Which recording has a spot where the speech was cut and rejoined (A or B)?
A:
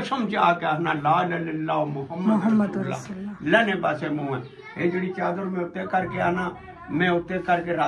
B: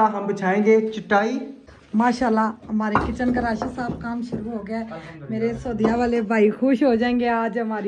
B